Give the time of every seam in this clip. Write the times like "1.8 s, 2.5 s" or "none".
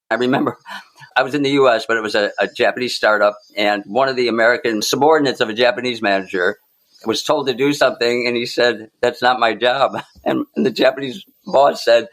1.1 s, 4.8 s